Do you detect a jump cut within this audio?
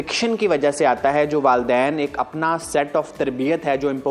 no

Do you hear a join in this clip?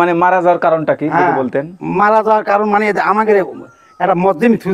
no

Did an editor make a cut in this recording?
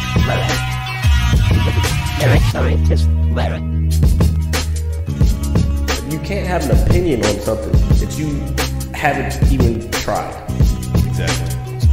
no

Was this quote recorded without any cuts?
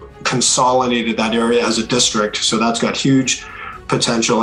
yes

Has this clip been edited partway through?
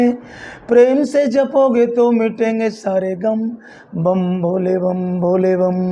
no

